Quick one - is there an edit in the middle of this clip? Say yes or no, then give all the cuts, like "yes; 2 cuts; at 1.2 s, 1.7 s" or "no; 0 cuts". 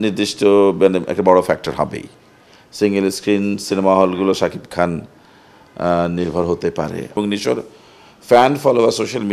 yes; 1 cut; at 7.1 s